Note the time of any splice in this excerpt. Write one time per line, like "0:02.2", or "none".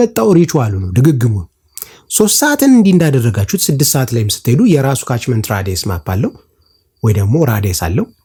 none